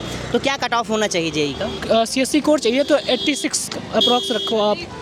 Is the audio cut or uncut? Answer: uncut